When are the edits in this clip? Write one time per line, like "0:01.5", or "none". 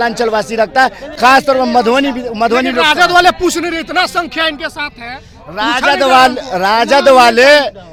none